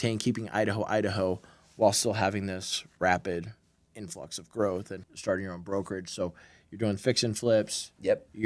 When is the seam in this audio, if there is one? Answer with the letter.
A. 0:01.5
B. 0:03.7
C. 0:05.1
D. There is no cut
C